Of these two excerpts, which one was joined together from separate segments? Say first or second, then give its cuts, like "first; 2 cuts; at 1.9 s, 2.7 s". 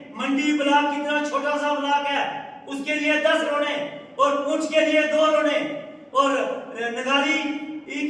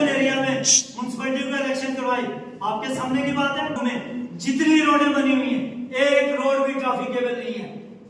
second; 1 cut; at 3.8 s